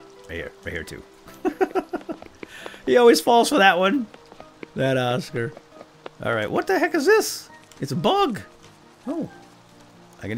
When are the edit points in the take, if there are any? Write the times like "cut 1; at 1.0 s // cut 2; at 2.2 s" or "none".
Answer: none